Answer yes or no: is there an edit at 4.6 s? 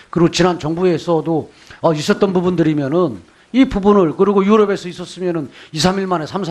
no